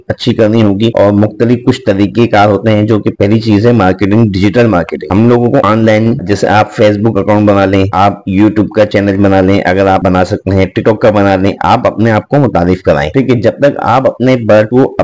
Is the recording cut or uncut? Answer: uncut